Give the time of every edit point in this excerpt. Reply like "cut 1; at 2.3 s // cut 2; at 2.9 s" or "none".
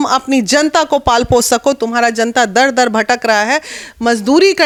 none